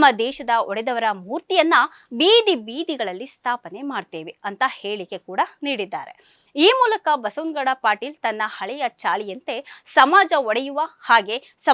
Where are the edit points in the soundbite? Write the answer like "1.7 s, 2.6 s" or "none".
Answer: none